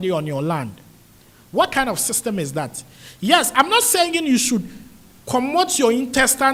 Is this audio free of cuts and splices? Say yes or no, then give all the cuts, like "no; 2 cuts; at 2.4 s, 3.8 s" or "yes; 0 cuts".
yes; 0 cuts